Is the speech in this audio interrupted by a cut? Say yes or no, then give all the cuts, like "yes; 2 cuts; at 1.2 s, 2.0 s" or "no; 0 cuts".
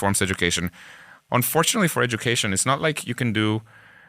yes; 1 cut; at 1.1 s